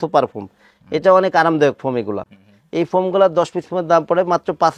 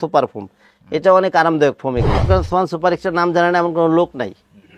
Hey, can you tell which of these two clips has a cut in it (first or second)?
second